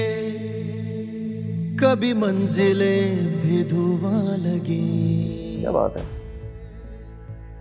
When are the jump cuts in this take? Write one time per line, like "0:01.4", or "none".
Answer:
0:05.5